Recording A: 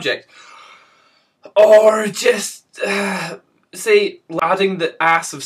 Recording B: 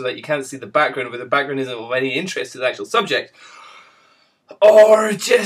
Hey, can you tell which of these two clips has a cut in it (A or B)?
A